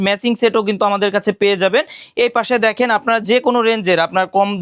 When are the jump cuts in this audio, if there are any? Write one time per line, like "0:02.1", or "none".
none